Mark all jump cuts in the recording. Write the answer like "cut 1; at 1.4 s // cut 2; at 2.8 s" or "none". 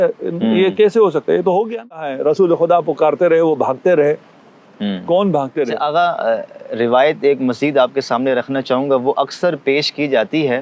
cut 1; at 2.1 s // cut 2; at 5.7 s